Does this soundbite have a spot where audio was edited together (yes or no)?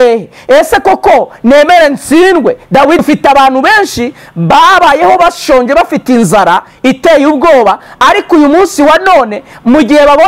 yes